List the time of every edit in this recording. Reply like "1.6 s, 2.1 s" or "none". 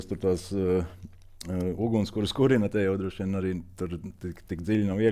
none